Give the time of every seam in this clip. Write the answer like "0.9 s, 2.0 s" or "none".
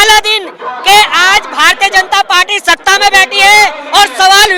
none

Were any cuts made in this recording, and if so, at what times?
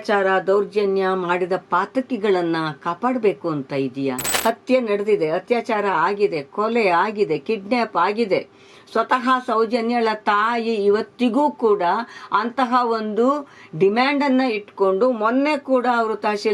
4.3 s

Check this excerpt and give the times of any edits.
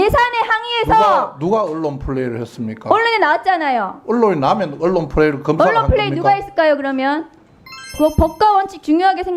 7.9 s

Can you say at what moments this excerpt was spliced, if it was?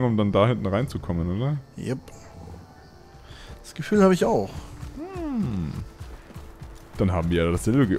none

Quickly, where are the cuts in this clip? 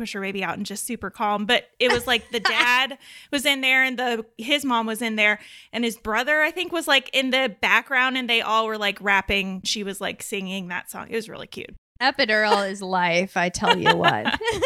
9.7 s, 12.0 s

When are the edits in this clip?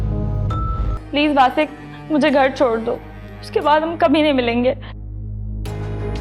1.0 s

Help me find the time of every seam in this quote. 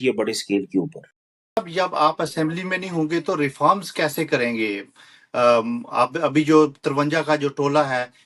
1.6 s

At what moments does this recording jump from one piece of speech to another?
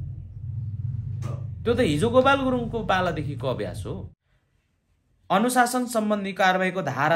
4.1 s

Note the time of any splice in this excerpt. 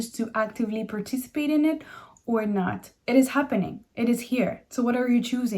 2.9 s

